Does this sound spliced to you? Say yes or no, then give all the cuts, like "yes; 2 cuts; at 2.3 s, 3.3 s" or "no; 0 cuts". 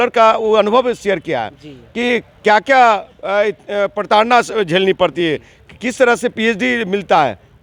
no; 0 cuts